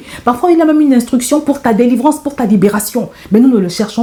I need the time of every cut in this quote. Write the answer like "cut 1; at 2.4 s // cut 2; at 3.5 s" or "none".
none